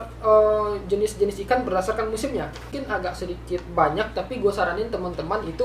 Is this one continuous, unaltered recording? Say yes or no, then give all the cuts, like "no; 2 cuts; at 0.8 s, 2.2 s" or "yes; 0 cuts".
no; 1 cut; at 2.7 s